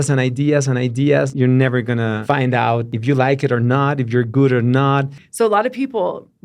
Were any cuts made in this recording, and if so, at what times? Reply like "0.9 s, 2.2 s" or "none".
1.3 s, 2.2 s, 2.9 s, 5.2 s